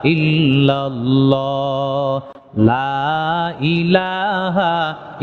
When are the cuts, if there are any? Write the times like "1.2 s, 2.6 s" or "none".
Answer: none